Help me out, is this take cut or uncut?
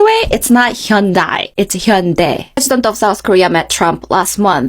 cut